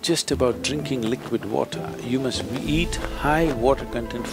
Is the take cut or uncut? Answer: uncut